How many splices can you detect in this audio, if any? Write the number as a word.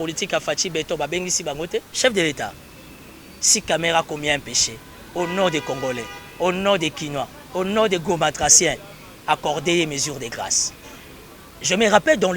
one